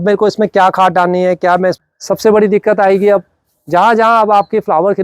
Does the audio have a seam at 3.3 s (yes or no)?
no